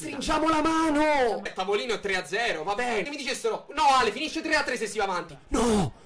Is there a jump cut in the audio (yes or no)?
yes